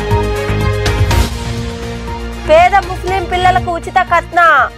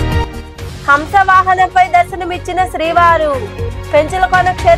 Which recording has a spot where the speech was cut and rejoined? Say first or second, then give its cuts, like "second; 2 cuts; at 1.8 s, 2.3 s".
first; 1 cut; at 1.0 s